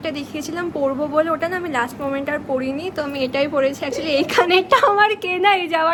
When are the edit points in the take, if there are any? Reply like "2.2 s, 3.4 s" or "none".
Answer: none